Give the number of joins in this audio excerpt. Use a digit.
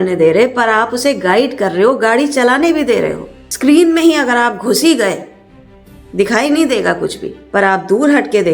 1